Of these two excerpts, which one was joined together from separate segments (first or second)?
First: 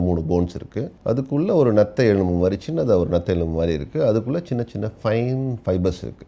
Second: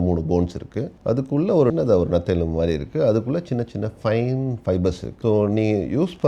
second